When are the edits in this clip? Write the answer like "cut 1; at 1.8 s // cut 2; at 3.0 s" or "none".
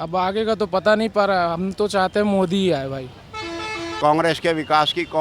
cut 1; at 3.8 s